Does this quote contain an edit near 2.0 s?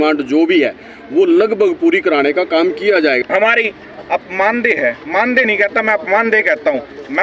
no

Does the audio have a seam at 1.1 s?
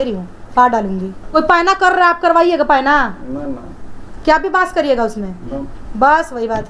yes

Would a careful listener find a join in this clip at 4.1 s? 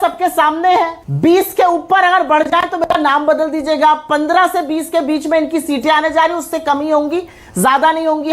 yes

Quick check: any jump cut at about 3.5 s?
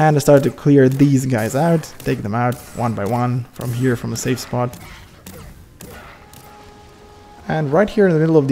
no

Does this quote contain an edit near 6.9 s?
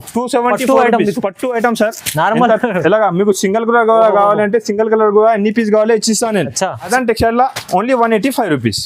yes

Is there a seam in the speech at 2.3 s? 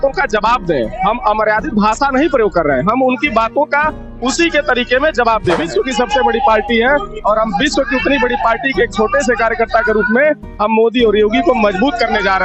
no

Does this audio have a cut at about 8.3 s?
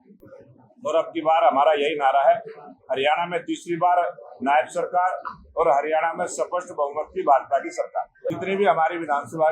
yes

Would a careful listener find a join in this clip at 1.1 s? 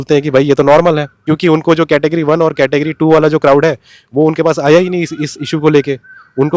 yes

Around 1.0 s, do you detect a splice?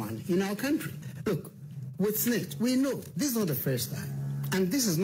yes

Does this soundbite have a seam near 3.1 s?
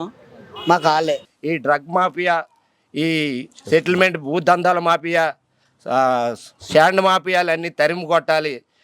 no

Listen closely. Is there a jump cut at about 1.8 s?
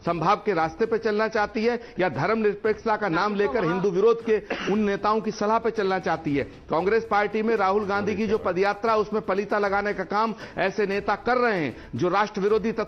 no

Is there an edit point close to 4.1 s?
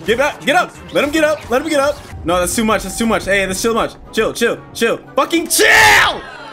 no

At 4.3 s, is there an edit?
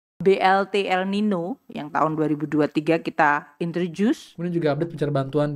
yes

